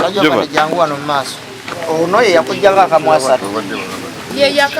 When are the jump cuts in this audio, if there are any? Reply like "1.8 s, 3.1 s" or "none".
1.6 s